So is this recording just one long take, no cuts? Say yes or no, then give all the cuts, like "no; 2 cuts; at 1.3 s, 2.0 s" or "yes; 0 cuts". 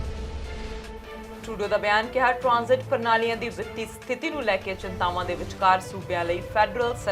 no; 1 cut; at 1.4 s